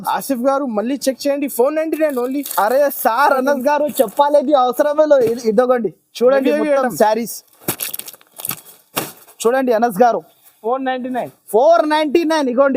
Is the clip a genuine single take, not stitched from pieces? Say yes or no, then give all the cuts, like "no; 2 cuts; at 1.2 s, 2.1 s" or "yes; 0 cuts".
yes; 0 cuts